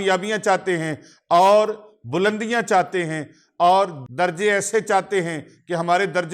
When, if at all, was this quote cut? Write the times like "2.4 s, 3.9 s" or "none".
4.0 s